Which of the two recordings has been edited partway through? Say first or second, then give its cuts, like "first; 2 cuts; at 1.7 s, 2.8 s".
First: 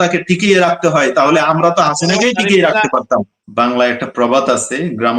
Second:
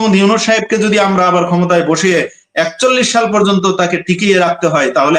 first; 1 cut; at 3.4 s